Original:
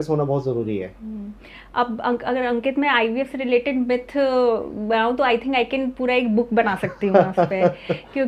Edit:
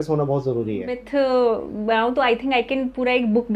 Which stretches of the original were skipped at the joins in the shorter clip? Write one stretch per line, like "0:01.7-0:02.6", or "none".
0:01.0-0:04.0